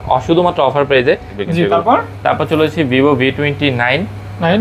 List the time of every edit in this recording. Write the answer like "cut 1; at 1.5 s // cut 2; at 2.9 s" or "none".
cut 1; at 1.4 s

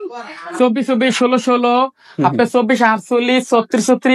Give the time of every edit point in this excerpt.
none

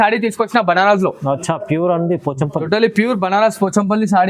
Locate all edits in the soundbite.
none

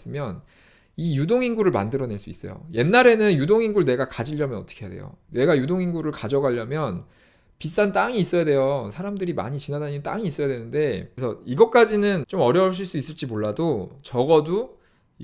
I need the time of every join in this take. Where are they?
cut 1; at 11.1 s // cut 2; at 12.2 s

